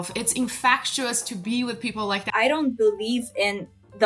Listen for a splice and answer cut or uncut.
cut